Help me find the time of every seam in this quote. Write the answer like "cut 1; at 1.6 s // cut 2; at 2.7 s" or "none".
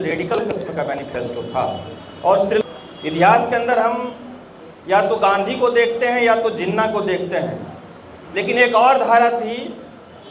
cut 1; at 2.6 s